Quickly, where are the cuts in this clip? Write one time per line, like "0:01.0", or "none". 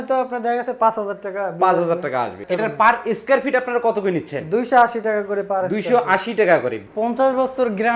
0:02.4
0:06.8